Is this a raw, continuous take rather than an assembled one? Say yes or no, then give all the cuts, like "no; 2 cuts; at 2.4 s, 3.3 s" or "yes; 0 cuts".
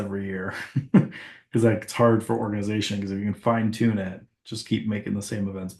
yes; 0 cuts